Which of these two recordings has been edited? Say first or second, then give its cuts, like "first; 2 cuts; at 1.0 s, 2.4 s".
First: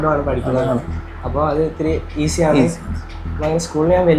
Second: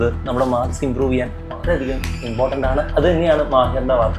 second; 1 cut; at 2.9 s